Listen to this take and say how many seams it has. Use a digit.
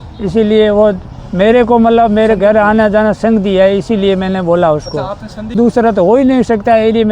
1